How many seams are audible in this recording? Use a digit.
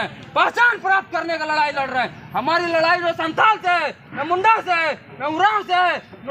0